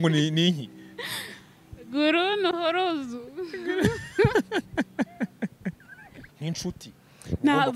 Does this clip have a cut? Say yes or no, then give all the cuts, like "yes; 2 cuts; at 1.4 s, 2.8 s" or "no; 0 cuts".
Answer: yes; 1 cut; at 6.2 s